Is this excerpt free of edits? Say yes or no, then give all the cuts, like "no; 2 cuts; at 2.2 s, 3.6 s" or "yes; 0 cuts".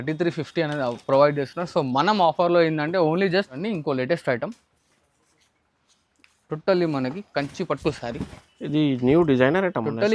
no; 1 cut; at 3.6 s